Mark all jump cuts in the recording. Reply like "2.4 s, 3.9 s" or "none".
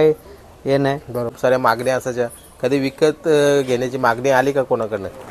1.4 s

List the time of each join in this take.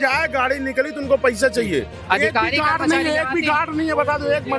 2.0 s

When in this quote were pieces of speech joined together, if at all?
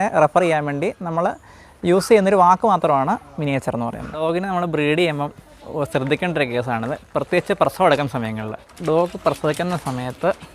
4.2 s, 8.7 s

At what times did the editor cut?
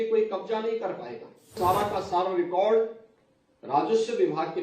1.6 s

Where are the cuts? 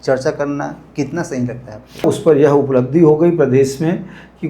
2.0 s

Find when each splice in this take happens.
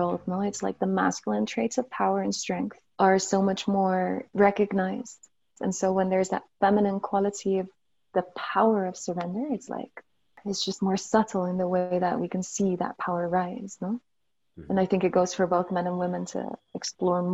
2.8 s, 4.3 s, 5.5 s, 10.3 s

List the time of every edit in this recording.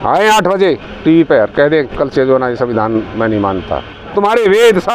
3.9 s

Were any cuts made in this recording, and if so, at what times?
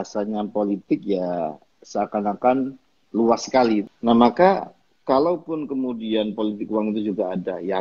3.9 s

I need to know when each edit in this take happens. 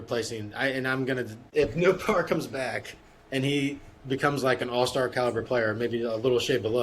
1.5 s

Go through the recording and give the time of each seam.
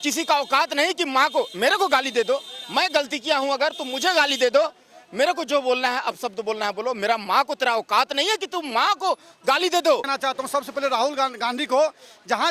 10.1 s

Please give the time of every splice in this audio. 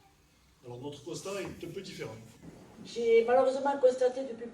2.5 s

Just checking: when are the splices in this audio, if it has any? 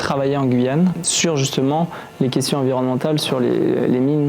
1.0 s

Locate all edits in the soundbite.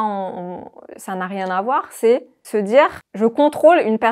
2.4 s, 3.0 s

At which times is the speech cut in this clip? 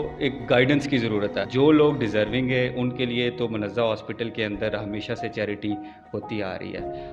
1.4 s

